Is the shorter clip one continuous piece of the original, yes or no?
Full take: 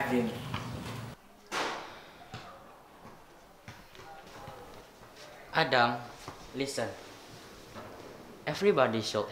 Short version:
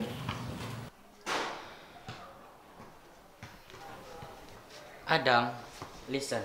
no